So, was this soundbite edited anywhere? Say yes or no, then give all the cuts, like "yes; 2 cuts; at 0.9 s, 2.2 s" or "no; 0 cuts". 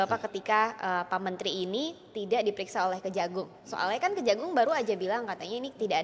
no; 0 cuts